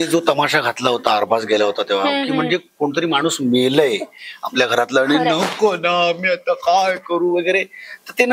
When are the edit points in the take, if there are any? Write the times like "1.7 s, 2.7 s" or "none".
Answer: none